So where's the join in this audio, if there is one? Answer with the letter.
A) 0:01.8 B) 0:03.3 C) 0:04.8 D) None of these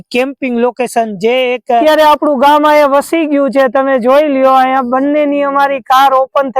A